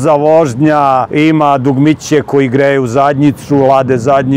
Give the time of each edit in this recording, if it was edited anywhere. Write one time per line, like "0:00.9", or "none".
0:01.1